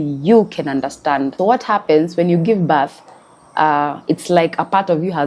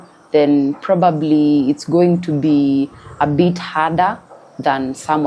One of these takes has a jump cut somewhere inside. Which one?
first; 1 cut; at 1.3 s

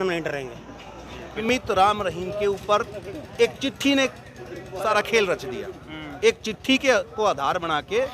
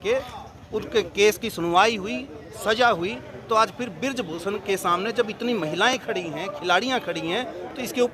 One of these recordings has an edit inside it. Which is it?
first; 1 cut; at 1.4 s

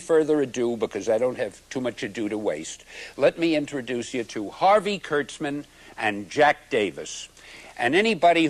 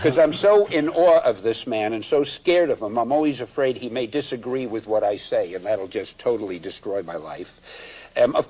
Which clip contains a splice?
first; 1 cut; at 4.7 s

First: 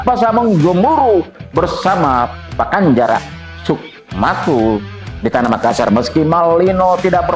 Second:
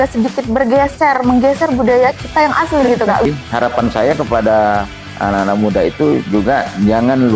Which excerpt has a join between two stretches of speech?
second; 1 cut; at 3.3 s

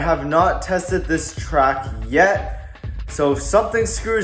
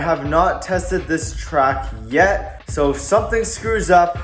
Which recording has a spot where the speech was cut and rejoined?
second; 1 cut; at 2.6 s

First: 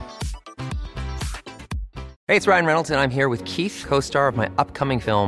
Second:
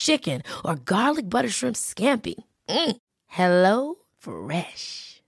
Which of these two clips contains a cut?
first; 1 cut; at 2.1 s

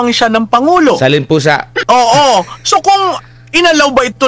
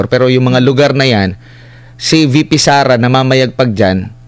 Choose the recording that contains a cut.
first; 1 cut; at 1.7 s

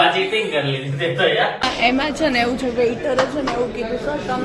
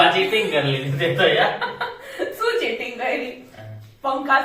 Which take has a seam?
first; 1 cut; at 1.7 s

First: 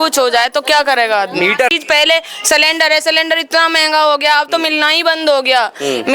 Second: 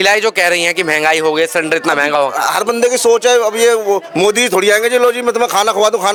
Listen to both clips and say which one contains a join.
first; 1 cut; at 1.7 s

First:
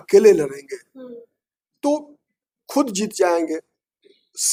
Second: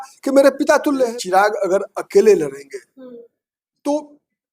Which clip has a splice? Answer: second; 1 cut; at 1.1 s

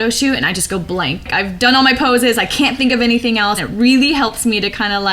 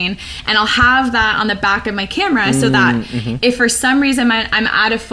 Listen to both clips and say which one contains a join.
first; 2 cuts; at 1.3 s, 3.7 s

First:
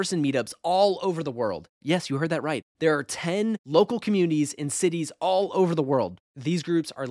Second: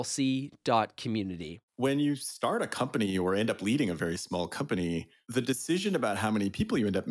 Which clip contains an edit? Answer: second; 2 cuts; at 1.6 s, 5.2 s

